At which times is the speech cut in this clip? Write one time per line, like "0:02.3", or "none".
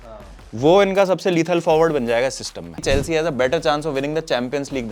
0:02.8